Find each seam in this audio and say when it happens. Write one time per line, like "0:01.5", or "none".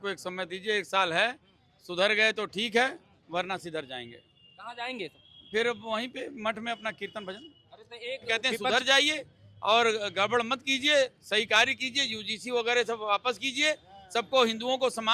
0:08.5